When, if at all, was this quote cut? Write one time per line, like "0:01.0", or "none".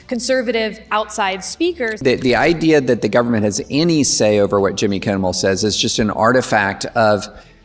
0:02.0